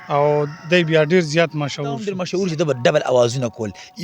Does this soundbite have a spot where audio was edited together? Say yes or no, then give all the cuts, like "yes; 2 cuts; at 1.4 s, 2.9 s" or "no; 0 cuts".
yes; 1 cut; at 2.2 s